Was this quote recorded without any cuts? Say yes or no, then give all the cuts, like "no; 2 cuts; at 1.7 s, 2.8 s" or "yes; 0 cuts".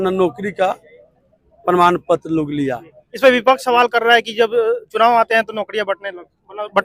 yes; 0 cuts